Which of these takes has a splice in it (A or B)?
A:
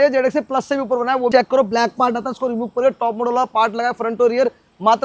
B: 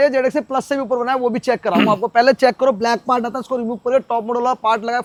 A